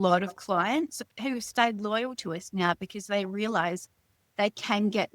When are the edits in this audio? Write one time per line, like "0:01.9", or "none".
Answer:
0:01.0